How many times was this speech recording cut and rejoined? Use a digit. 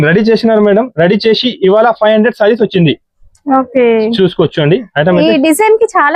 0